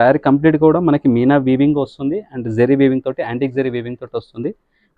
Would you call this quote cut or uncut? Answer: uncut